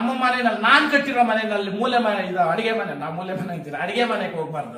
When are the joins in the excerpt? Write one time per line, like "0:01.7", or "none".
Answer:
none